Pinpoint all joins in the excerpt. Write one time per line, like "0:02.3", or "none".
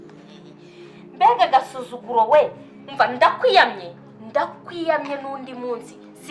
0:01.2